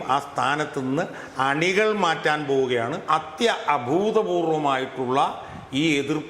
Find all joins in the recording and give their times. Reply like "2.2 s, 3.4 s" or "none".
3.0 s